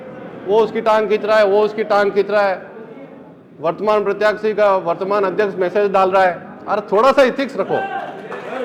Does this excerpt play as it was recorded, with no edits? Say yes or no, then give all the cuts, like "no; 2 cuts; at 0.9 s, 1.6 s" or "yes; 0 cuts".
yes; 0 cuts